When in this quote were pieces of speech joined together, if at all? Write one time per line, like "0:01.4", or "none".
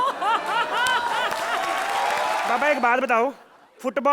0:02.5